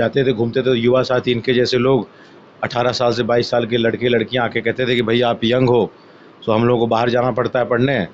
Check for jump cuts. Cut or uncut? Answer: uncut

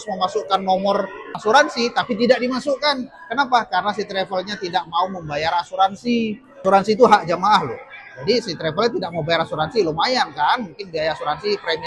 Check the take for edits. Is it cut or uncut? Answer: cut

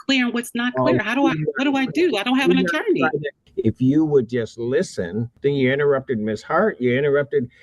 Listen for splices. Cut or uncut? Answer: cut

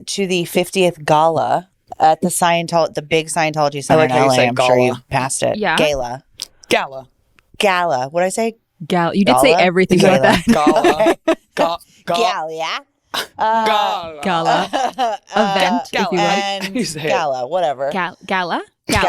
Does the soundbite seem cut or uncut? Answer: cut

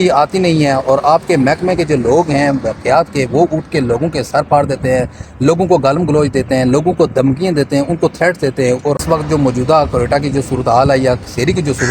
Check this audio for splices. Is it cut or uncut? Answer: cut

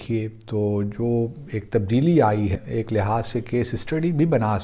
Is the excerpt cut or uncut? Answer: cut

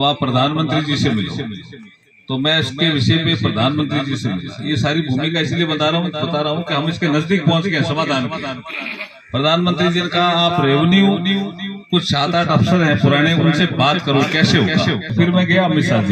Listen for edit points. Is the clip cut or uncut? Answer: cut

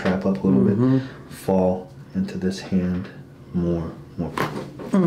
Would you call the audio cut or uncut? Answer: uncut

